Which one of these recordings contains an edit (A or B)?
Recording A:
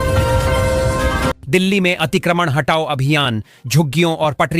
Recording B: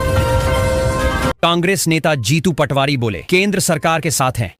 A